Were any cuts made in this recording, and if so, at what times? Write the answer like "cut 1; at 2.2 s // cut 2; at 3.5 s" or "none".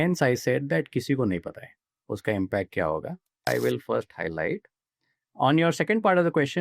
cut 1; at 3.5 s